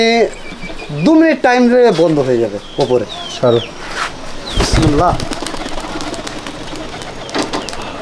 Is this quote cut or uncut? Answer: uncut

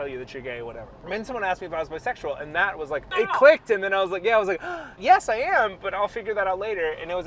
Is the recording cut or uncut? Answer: cut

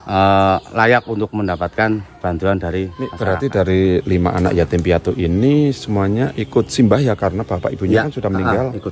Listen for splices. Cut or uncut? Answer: cut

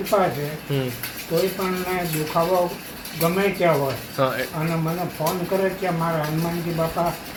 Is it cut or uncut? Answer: uncut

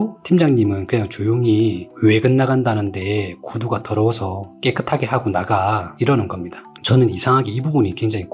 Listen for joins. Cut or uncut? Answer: cut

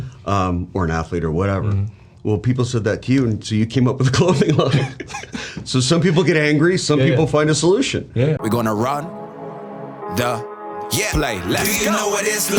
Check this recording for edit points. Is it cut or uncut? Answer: cut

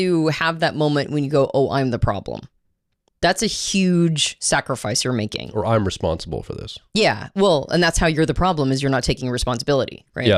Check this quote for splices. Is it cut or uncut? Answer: uncut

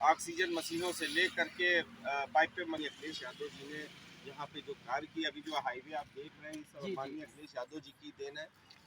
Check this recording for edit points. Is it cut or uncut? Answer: cut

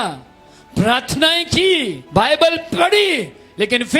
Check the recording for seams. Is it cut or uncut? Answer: cut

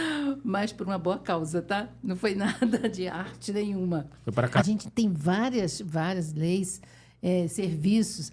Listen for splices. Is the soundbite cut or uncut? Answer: cut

